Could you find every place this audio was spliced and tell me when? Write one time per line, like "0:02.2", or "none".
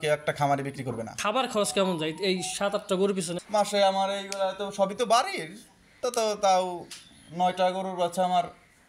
0:01.2
0:03.3